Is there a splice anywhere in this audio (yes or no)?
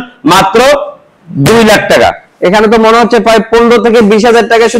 no